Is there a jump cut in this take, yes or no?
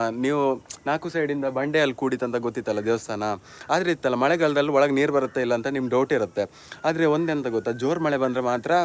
no